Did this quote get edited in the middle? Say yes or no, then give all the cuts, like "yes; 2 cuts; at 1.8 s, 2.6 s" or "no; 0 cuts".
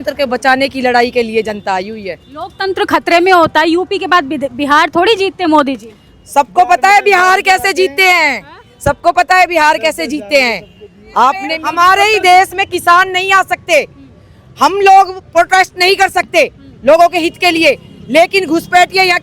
yes; 1 cut; at 11.5 s